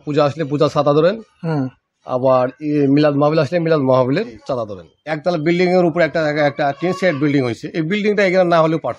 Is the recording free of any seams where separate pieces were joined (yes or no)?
no